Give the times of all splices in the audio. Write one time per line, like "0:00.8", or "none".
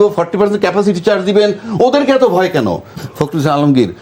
0:03.0